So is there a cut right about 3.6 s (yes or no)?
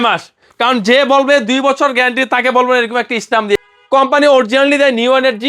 yes